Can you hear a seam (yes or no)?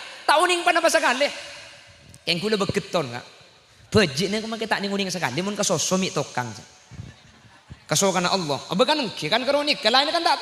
no